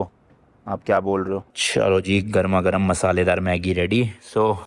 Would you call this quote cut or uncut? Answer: cut